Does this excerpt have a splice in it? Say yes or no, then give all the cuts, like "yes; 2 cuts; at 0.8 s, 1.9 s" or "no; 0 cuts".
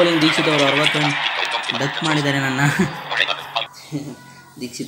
yes; 1 cut; at 3.8 s